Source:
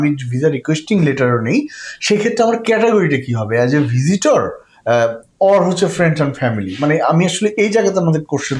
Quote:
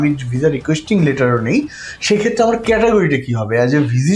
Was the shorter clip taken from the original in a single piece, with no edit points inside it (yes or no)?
yes